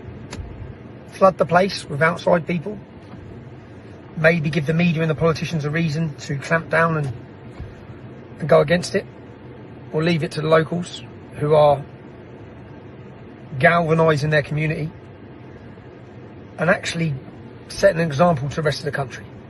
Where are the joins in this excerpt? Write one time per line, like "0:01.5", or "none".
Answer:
none